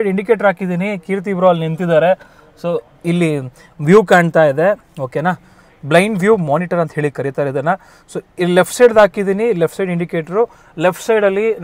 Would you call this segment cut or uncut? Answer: uncut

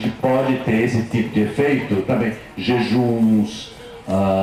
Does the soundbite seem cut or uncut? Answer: uncut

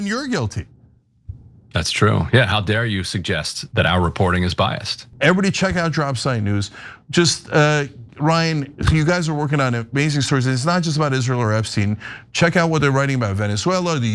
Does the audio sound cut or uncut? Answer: cut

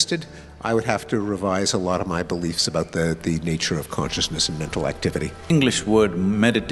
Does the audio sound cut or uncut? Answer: cut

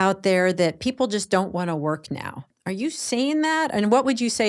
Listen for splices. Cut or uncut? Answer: cut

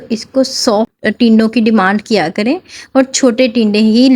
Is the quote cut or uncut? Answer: cut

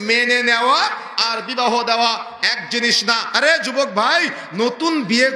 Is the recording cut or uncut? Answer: cut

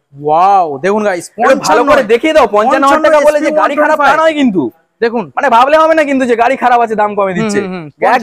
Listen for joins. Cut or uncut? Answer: uncut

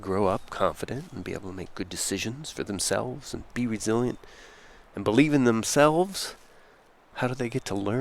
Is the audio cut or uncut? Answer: uncut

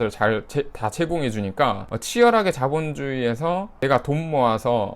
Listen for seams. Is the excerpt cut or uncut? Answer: cut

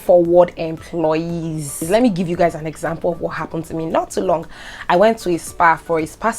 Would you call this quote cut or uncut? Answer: cut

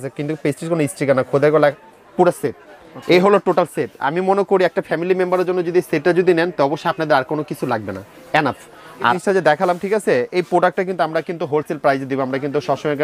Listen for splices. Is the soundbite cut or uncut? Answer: cut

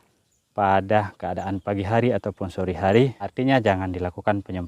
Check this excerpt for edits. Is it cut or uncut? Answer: cut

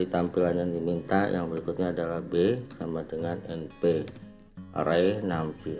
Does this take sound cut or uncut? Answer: uncut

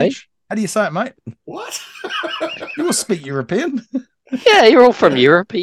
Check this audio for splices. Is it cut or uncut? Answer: cut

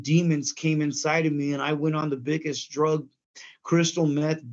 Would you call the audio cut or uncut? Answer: uncut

